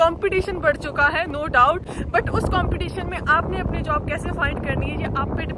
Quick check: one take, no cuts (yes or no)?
yes